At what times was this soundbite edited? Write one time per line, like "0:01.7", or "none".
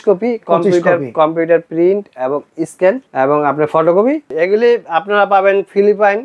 0:04.3